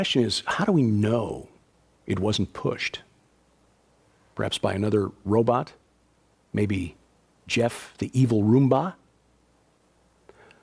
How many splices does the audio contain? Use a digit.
0